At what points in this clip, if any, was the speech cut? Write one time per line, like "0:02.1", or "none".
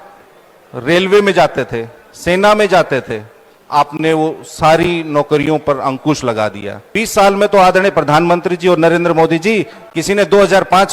0:06.8

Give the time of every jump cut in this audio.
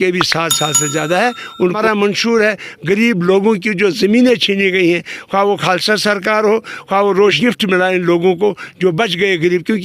0:01.8
0:07.4

